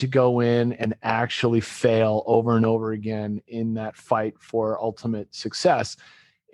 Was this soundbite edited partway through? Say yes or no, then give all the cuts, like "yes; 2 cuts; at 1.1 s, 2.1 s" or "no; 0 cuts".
no; 0 cuts